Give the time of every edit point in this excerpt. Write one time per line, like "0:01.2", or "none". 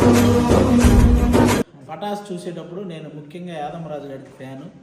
0:01.8